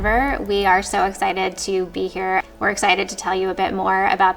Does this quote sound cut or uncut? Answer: cut